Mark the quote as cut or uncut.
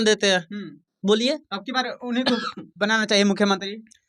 uncut